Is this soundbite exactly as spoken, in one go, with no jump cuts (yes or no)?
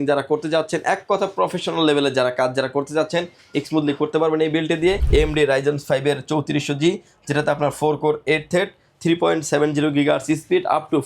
no